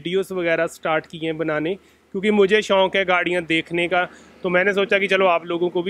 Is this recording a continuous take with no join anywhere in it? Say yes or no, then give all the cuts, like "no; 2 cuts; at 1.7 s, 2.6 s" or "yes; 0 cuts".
yes; 0 cuts